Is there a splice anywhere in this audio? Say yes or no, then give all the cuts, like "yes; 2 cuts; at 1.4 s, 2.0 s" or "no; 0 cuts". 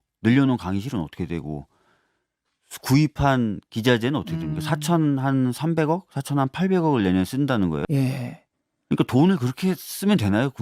yes; 1 cut; at 7.8 s